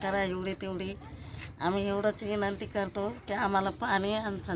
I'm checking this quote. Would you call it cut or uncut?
uncut